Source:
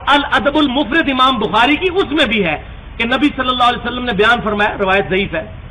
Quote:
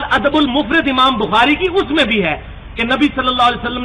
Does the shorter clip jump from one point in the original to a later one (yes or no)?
no